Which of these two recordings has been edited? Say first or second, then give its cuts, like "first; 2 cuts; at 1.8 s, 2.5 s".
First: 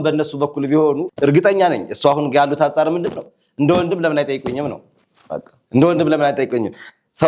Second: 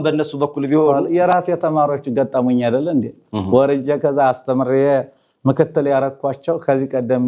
second; 1 cut; at 1.0 s